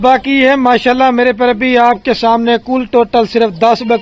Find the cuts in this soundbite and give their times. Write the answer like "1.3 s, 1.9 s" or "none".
none